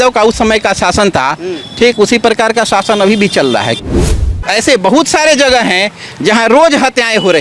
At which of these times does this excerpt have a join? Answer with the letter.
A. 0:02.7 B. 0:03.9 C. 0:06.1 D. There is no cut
B